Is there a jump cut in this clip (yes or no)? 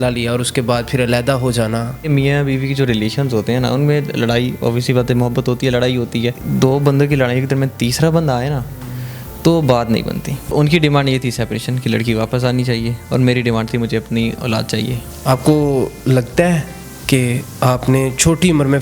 yes